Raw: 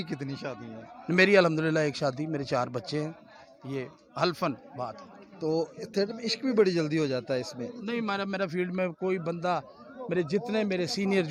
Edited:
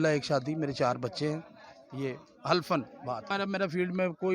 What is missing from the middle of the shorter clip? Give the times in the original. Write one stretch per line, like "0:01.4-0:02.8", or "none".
0:05.0-0:08.1